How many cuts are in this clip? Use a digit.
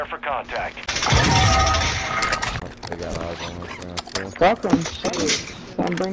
1